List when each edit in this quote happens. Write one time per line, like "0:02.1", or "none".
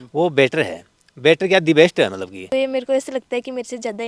0:02.5